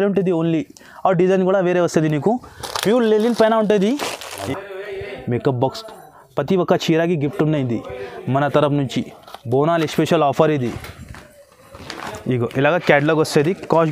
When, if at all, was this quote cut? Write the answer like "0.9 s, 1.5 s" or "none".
4.4 s